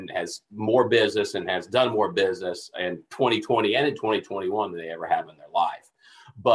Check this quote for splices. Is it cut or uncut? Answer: uncut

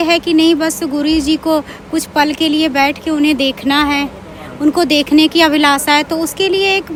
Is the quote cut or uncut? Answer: uncut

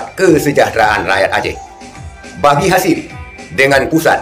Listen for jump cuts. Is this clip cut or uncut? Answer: uncut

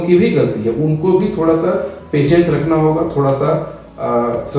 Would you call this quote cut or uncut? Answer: uncut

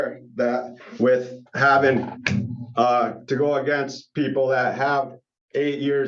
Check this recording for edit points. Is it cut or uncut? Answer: uncut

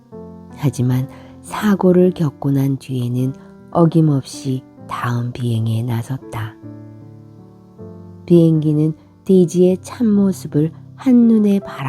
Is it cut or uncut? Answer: cut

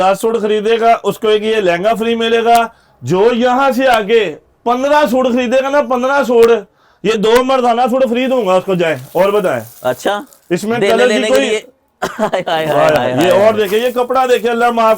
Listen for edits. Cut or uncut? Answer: uncut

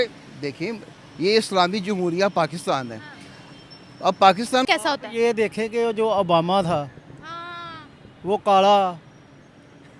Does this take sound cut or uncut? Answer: cut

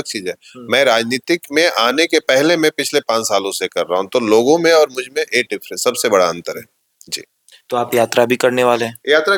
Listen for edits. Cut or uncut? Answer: uncut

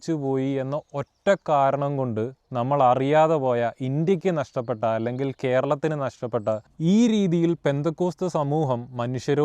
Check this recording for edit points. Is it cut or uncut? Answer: cut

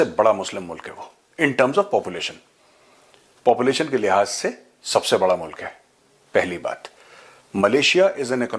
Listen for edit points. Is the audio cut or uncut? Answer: uncut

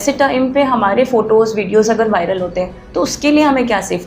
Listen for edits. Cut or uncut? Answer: uncut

